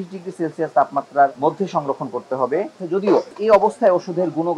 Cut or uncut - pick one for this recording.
cut